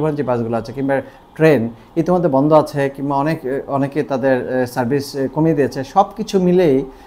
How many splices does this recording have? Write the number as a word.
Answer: zero